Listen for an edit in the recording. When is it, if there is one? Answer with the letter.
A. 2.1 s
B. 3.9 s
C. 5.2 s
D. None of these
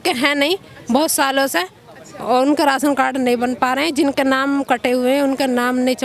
D